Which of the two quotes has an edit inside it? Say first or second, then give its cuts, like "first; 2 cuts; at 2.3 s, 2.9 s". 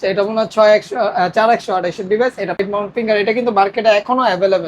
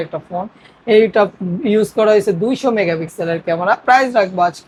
first; 1 cut; at 2.6 s